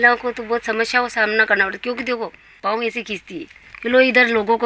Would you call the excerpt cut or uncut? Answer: cut